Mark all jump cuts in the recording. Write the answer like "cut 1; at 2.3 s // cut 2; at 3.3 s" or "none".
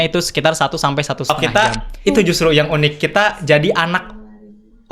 cut 1; at 1.3 s